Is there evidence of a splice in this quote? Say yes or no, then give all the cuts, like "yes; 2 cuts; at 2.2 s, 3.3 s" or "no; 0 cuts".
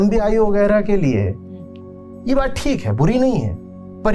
no; 0 cuts